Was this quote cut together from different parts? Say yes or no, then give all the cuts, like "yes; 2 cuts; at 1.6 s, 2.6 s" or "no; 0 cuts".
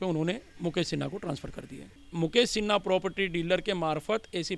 yes; 1 cut; at 2.0 s